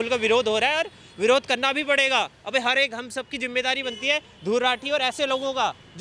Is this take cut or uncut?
uncut